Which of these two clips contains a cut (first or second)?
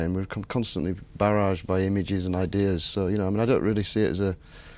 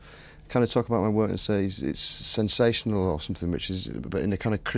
first